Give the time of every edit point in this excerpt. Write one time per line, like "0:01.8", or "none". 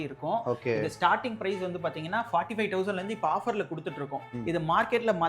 0:04.3